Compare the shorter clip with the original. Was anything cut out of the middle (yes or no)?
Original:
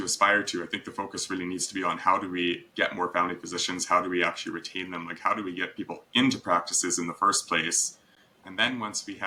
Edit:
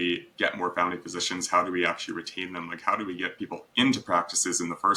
no